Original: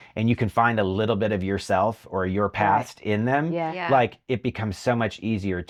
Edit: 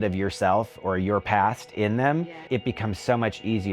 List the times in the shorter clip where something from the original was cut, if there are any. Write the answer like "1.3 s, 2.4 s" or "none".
2.3 s

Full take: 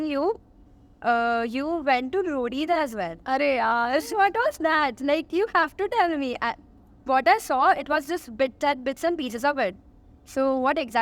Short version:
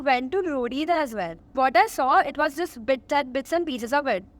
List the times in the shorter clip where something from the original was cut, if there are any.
1.3 s

